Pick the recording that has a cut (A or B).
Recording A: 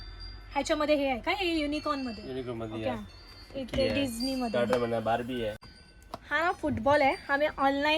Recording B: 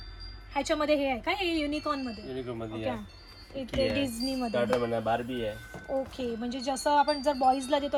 A